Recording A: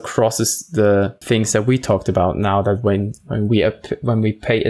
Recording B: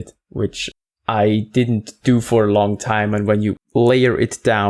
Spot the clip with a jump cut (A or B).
B